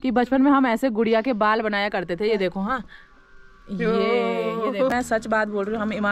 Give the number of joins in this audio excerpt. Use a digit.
1